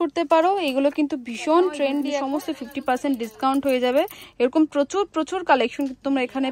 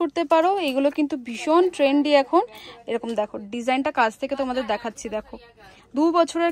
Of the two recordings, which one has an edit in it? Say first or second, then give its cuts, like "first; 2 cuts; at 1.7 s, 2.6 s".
first; 1 cut; at 2.1 s